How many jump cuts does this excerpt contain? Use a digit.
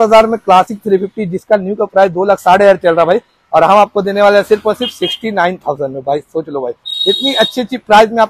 0